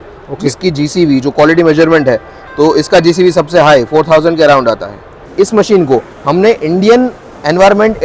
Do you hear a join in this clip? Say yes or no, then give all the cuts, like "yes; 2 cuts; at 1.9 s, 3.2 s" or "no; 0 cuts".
yes; 1 cut; at 5.3 s